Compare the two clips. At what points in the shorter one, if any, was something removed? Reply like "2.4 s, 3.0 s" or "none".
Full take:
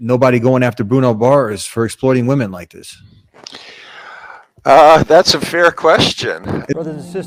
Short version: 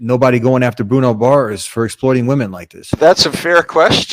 3.0 s

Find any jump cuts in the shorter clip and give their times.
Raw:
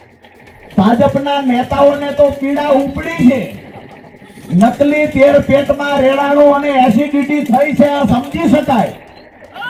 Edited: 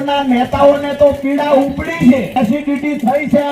2.4 s

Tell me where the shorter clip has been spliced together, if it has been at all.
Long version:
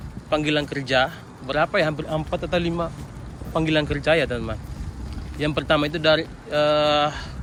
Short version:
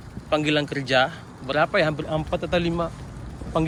none

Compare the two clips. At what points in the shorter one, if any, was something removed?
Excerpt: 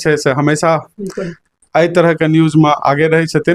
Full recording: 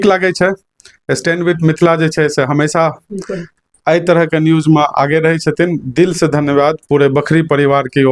none

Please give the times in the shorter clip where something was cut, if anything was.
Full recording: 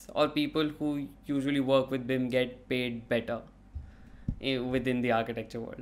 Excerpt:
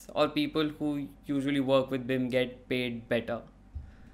none

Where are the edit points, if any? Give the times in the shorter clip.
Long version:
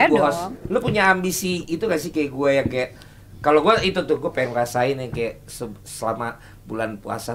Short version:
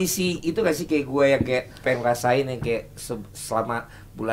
1.8 s

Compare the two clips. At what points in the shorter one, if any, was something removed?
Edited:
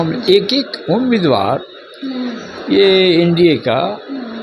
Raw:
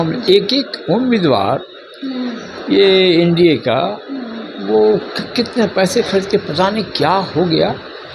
none

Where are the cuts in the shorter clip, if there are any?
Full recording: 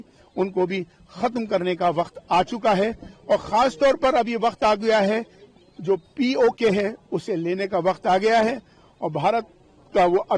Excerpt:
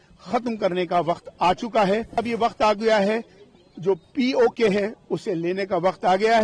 2.2 s

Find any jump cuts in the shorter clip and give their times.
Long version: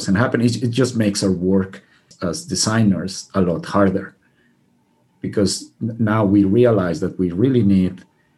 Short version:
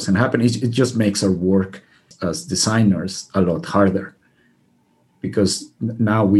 none

